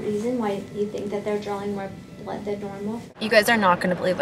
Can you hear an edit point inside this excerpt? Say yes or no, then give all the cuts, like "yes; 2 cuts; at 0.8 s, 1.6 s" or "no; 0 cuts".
yes; 1 cut; at 3.1 s